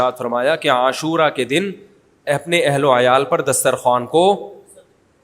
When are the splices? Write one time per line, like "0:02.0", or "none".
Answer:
none